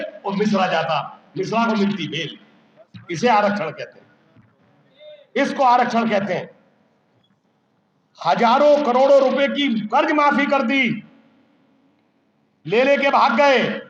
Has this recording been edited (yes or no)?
no